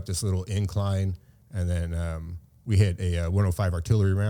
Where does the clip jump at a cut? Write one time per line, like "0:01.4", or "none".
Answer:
none

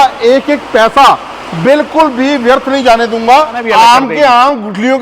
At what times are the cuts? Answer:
0:03.6

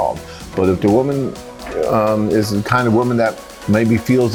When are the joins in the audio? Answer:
none

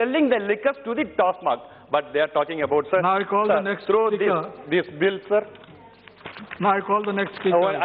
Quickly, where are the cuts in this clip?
none

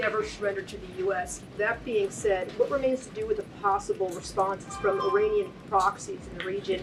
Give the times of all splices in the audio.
none

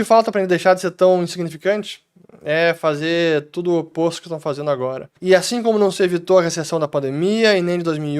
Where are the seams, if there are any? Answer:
0:05.1

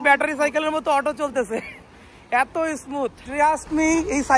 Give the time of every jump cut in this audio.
0:03.3

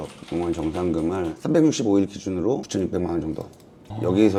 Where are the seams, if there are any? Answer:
none

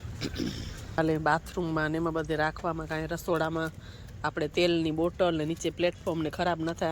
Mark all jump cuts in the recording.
0:01.0

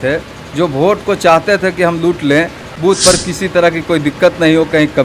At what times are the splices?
0:02.6

